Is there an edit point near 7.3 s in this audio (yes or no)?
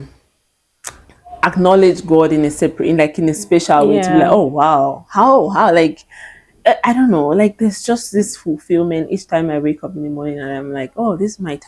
no